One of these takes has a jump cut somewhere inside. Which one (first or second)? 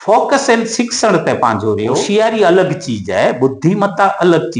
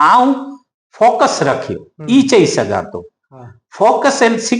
first